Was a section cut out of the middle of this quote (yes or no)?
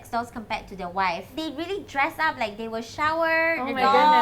yes